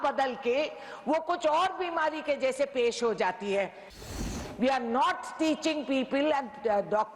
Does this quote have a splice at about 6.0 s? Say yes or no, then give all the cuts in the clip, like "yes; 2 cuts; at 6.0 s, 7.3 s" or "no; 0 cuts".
no; 1 cut; at 4.2 s